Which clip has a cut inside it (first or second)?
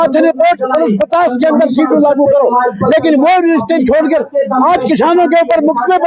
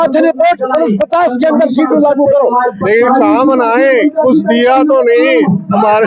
second